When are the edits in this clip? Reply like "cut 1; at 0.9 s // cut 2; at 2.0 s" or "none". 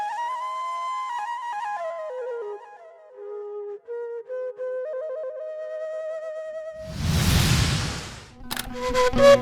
cut 1; at 6.8 s